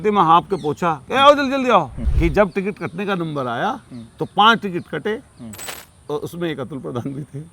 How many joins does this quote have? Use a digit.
1